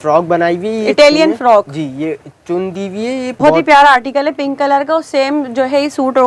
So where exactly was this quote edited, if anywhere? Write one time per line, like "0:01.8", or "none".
0:03.4